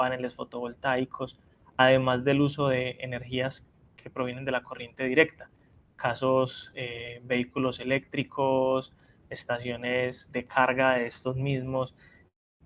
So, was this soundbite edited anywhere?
yes; 1 cut; at 1.7 s

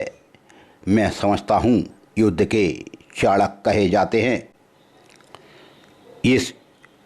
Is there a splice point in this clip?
yes; 1 cut; at 4.5 s

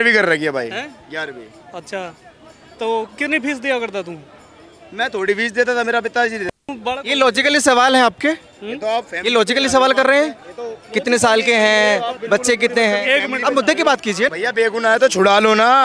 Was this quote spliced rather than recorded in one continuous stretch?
yes; 2 cuts; at 6.7 s, 14.3 s

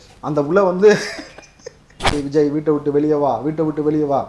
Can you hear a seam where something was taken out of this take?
yes; 1 cut; at 2.2 s

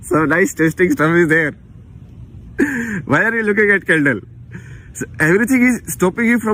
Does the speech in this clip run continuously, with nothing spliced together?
yes; 0 cuts

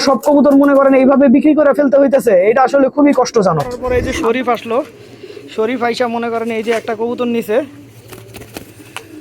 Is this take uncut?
no; 1 cut; at 3.8 s

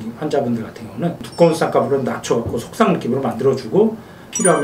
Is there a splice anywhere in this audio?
yes; 1 cut; at 1.3 s

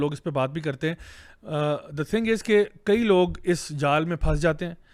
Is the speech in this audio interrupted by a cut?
no; 0 cuts

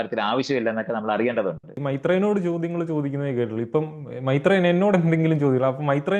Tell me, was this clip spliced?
yes; 1 cut; at 1.8 s

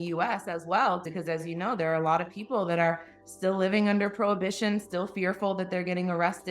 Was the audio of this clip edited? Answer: yes; 1 cut; at 1.1 s

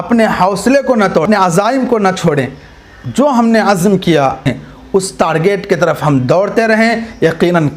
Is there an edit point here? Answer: yes; 2 cuts; at 1.2 s, 4.4 s

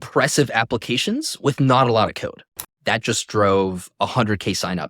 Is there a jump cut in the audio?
yes; 1 cut; at 2.5 s

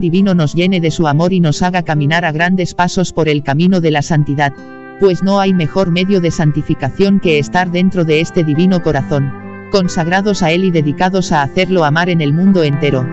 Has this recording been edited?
no; 0 cuts

